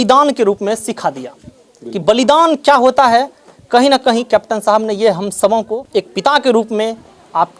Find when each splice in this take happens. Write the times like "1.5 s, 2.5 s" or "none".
5.8 s